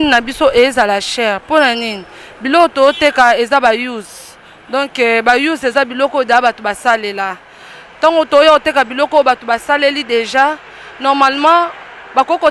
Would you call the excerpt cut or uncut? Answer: uncut